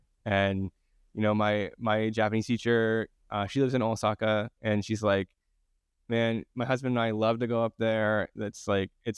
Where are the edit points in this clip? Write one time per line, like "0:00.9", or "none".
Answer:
none